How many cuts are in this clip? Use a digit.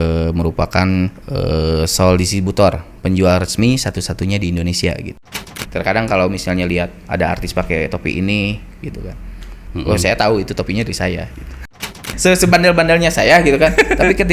3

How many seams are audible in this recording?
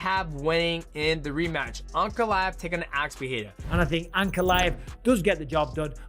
1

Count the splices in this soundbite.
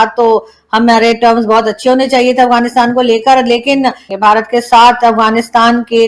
1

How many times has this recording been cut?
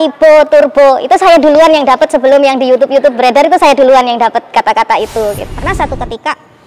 1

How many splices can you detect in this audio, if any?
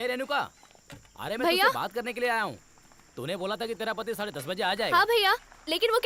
0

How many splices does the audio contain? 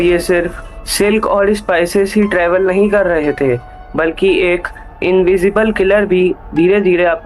0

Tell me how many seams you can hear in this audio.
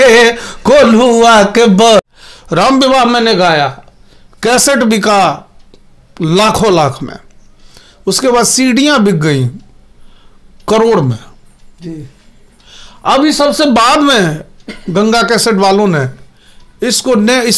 1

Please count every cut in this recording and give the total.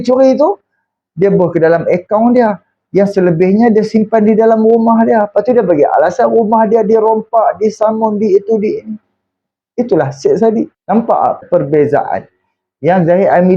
1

